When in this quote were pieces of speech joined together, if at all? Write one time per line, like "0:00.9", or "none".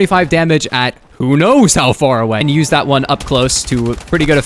0:02.4